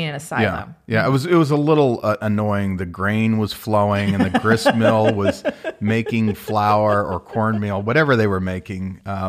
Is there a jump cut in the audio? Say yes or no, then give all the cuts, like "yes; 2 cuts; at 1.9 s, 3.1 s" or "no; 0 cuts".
no; 0 cuts